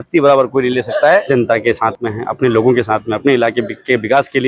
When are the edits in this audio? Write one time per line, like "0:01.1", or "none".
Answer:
0:01.2